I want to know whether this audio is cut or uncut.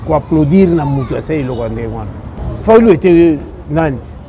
cut